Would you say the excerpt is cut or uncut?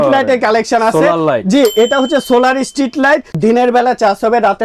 uncut